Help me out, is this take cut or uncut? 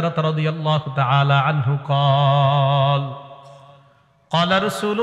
uncut